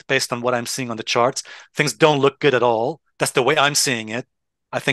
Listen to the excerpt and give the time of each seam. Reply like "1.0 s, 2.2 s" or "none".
3.0 s